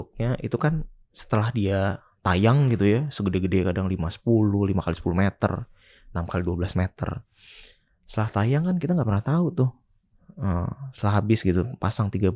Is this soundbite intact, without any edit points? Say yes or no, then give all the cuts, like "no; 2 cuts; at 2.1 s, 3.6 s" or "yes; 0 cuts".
yes; 0 cuts